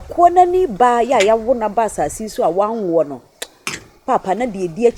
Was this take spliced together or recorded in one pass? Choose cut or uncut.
uncut